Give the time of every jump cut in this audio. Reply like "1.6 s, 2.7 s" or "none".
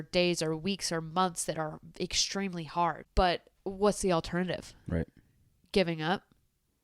3.0 s